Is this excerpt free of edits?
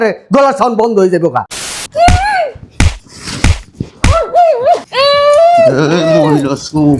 no; 1 cut; at 1.5 s

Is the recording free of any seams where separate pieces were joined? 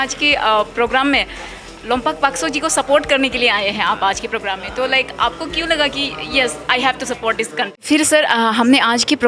no; 1 cut; at 7.8 s

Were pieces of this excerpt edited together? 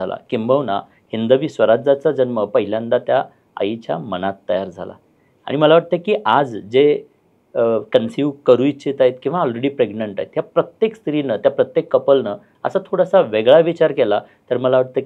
no; 0 cuts

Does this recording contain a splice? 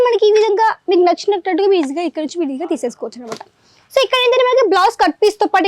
no; 0 cuts

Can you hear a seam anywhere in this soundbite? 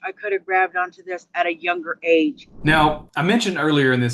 yes; 1 cut; at 2.5 s

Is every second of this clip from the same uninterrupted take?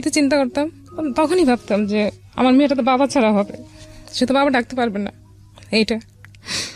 yes; 0 cuts

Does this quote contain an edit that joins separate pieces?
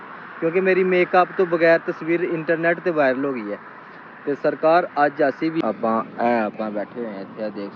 yes; 1 cut; at 5.6 s

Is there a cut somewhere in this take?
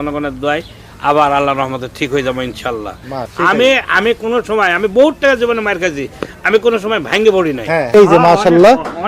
yes; 2 cuts; at 3.3 s, 7.9 s

